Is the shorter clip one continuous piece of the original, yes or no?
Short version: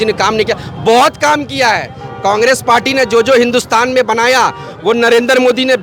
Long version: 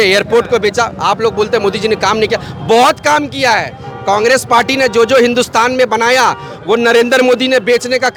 yes